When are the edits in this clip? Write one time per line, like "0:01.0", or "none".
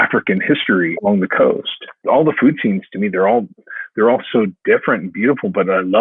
0:01.0
0:01.9